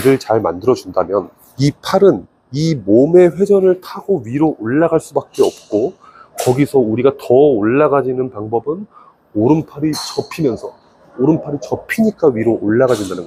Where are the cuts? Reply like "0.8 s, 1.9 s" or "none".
none